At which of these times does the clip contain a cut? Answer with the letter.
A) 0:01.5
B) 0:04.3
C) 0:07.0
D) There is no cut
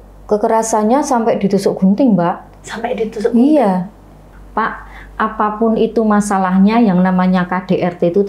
B